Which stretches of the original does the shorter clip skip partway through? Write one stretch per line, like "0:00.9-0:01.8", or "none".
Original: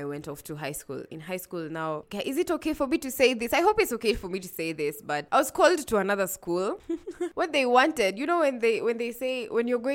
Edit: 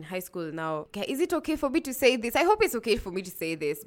none